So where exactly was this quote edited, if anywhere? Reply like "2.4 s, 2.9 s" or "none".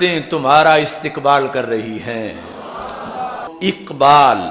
3.5 s